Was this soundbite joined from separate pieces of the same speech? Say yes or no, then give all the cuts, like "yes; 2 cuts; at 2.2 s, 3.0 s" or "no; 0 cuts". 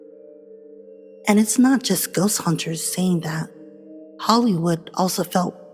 yes; 1 cut; at 1.2 s